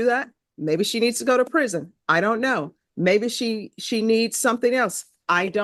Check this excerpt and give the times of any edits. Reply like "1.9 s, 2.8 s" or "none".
none